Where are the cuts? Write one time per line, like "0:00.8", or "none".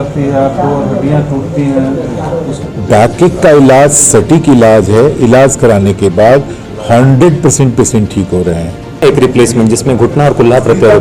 0:02.6
0:09.0